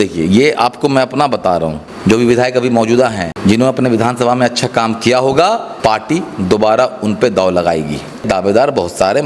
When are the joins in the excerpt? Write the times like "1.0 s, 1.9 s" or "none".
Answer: 1.8 s, 3.3 s, 5.7 s, 8.3 s